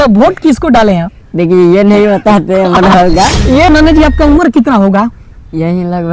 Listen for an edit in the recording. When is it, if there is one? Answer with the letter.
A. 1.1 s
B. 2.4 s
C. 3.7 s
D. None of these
C